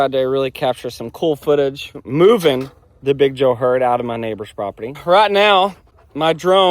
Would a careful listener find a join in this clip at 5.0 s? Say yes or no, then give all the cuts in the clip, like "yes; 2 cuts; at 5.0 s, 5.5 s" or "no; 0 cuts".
yes; 2 cuts; at 2.0 s, 5.0 s